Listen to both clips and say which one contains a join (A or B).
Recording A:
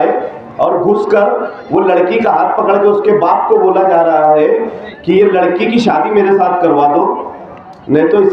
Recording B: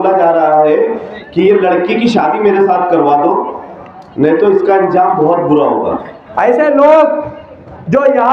B